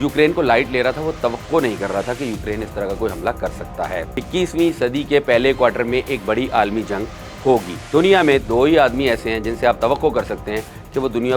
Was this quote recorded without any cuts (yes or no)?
no